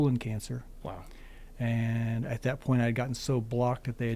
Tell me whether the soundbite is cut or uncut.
uncut